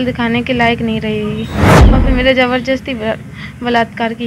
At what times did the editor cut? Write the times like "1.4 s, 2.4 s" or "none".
1.8 s